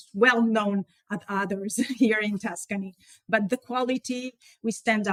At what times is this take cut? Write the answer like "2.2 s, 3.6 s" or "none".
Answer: none